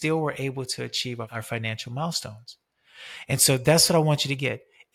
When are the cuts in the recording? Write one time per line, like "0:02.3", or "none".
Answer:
0:01.3

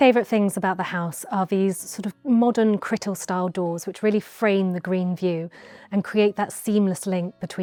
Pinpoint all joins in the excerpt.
none

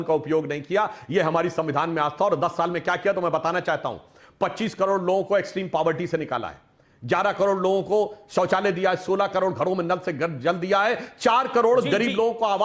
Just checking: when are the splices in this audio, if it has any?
none

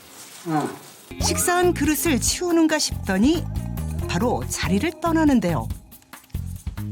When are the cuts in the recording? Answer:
0:01.1

